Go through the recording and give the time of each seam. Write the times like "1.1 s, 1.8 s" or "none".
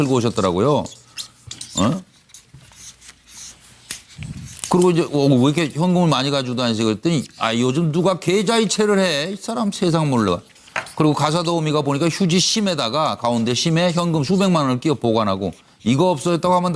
none